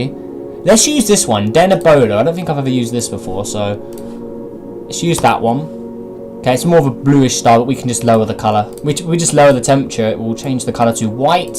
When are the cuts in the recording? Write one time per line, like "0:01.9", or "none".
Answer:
none